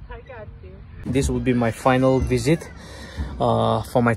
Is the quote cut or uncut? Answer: cut